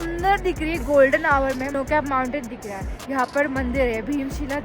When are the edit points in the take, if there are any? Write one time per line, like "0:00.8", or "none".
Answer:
0:01.7